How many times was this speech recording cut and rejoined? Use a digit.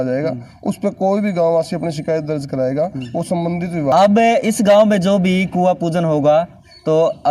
1